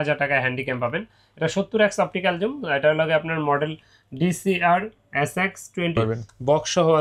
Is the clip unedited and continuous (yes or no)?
no